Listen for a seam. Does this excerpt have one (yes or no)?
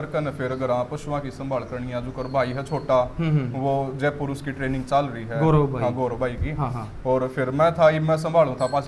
no